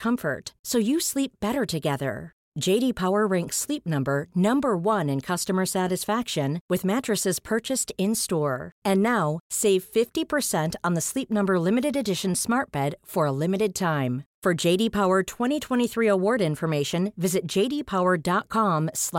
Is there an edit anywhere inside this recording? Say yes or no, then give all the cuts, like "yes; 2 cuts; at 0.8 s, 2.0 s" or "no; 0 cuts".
no; 0 cuts